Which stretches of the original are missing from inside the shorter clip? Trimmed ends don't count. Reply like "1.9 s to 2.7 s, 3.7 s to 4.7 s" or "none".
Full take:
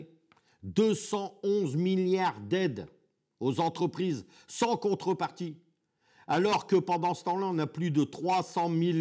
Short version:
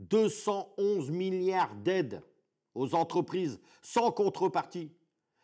none